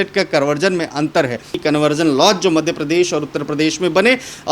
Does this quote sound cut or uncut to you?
cut